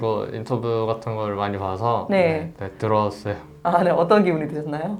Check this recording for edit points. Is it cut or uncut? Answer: uncut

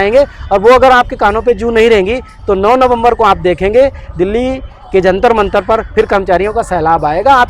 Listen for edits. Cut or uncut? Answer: uncut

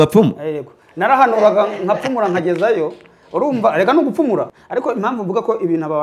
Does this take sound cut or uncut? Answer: cut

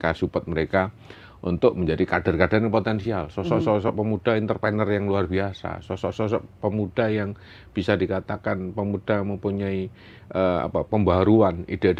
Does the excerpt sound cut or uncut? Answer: uncut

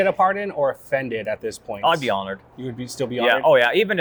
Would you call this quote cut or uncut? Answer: uncut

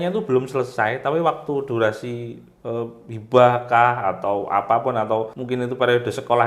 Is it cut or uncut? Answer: cut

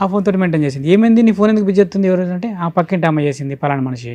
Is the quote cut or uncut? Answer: uncut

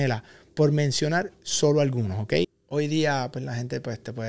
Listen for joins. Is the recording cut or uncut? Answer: cut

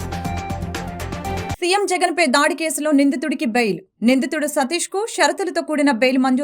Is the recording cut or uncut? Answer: cut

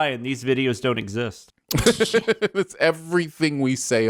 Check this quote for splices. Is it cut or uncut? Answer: uncut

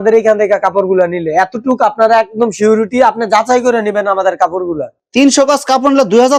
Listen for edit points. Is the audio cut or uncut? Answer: uncut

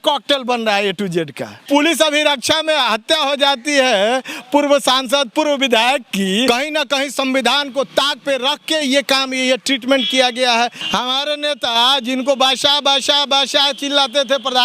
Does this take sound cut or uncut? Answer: cut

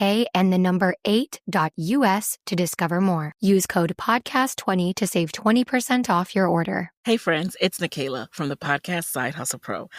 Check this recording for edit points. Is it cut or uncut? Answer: cut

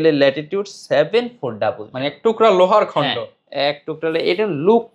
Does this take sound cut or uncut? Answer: uncut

